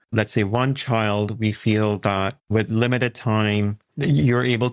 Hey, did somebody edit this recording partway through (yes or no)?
yes